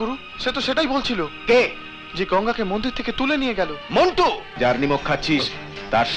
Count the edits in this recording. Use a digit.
1